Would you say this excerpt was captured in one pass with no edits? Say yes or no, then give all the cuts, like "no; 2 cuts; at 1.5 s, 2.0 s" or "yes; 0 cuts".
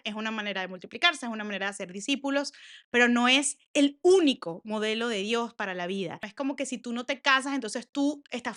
no; 1 cut; at 6.2 s